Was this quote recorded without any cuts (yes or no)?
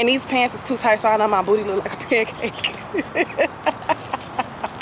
yes